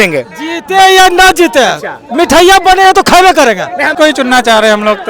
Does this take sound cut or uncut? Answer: cut